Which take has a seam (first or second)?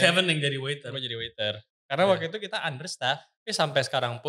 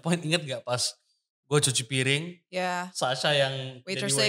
first